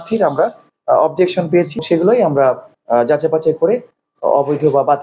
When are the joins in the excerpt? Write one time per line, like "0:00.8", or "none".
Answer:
0:01.8

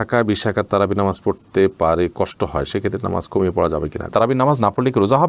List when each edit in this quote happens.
0:04.1

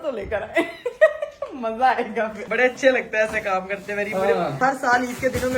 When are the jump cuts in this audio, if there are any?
0:02.4
0:04.6

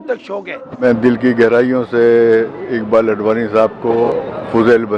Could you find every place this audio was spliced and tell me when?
0:00.8
0:04.1

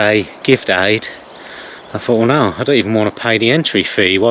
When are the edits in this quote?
none

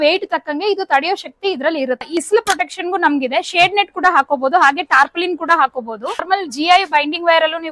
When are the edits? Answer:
0:02.2
0:06.2

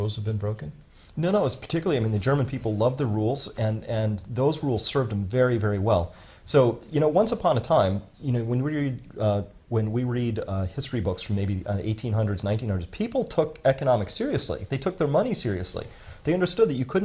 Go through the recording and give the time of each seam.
0:09.2

